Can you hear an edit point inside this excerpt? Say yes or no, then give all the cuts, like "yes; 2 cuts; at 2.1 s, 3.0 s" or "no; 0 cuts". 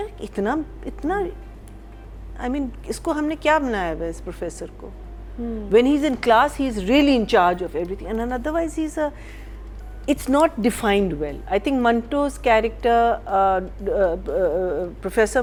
no; 0 cuts